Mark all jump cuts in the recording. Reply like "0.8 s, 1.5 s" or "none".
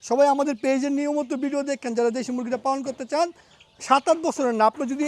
3.5 s